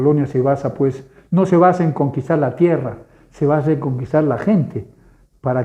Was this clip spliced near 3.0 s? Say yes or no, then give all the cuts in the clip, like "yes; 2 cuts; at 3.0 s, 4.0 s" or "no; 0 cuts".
no; 0 cuts